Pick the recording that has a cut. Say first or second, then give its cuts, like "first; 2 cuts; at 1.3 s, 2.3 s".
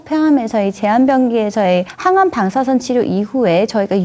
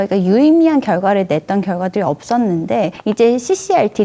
second; 1 cut; at 3.0 s